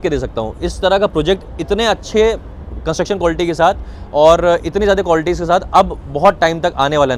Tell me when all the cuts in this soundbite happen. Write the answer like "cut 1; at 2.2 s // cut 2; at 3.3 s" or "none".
none